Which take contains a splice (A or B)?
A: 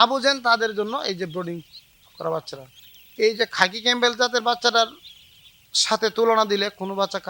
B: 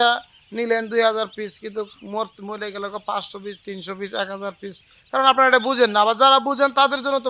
A